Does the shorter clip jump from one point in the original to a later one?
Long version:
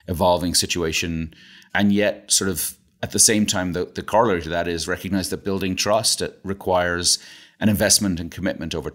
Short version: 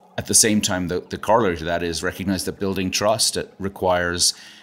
no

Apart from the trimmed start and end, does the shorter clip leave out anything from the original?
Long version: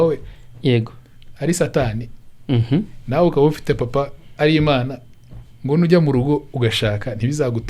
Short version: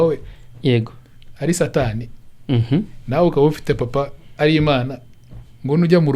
no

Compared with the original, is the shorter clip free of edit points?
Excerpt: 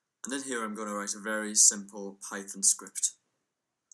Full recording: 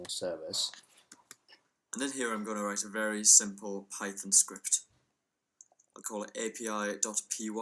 yes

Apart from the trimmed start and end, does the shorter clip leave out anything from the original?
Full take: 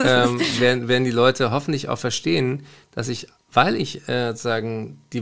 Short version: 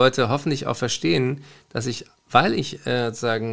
no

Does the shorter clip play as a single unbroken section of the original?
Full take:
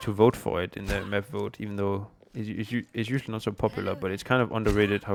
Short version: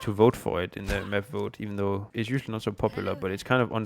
no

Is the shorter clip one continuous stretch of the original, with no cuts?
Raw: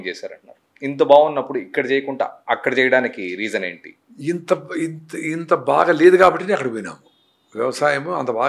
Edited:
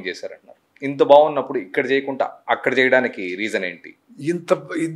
yes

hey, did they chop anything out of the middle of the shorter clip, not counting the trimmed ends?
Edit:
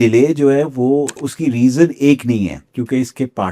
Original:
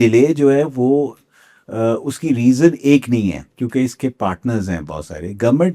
yes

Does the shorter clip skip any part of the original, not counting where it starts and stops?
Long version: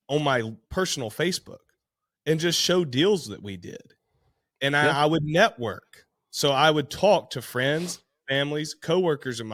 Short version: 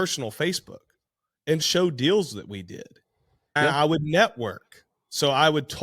yes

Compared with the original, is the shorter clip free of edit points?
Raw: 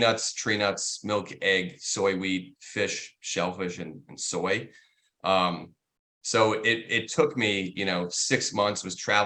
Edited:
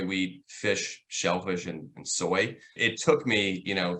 no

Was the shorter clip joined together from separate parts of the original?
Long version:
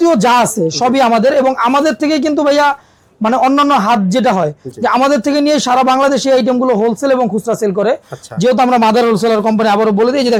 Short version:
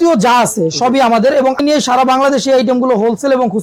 yes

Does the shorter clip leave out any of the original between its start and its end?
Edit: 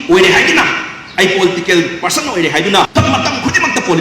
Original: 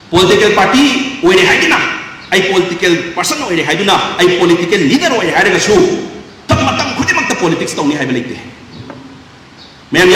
yes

